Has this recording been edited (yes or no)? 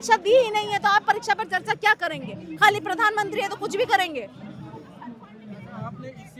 no